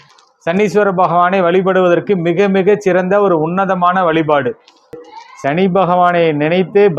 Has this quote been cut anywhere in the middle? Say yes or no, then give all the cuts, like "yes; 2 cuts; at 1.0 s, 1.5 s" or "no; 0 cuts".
yes; 1 cut; at 5.1 s